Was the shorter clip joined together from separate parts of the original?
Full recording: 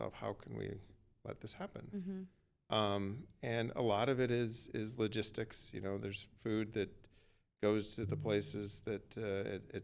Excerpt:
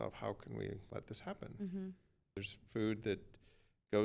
yes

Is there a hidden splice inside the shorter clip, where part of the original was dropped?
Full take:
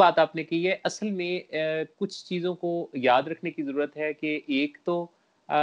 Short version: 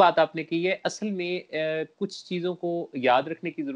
no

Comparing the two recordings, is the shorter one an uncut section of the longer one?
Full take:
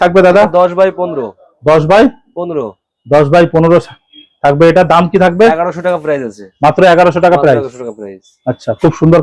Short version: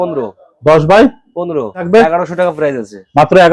no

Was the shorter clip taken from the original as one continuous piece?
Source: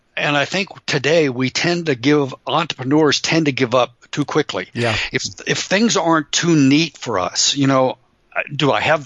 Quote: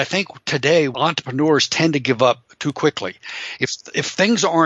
no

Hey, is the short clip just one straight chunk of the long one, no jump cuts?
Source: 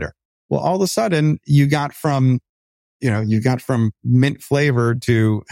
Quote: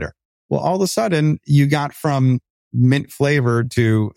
no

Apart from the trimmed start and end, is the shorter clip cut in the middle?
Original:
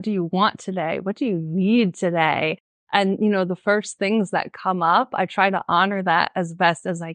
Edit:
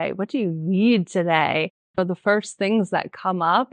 yes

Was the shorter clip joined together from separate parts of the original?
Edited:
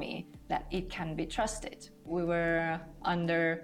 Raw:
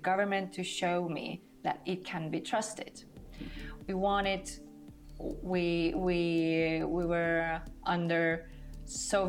yes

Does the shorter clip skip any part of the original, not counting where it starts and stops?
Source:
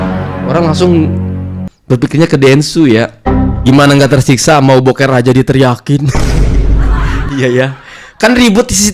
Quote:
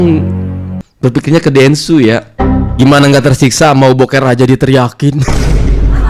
no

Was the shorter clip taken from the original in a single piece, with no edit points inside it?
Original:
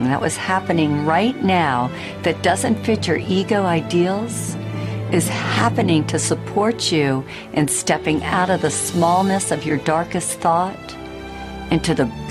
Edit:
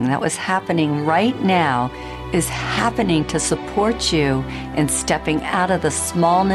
no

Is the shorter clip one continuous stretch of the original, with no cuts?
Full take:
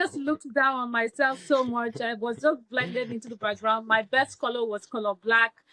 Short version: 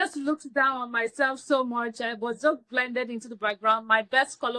yes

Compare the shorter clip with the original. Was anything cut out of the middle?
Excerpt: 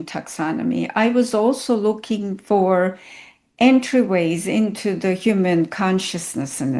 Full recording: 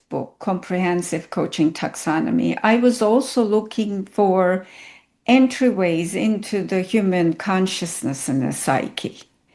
no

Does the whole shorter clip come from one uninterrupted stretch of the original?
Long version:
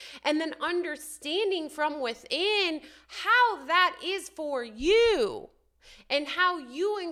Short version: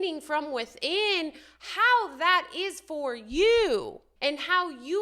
no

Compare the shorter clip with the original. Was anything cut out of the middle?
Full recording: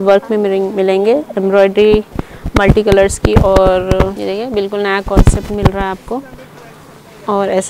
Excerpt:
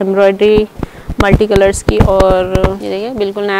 no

